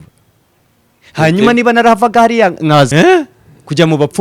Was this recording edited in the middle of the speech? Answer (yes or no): yes